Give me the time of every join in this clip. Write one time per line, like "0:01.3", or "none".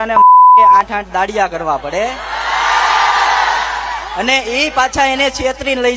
0:00.9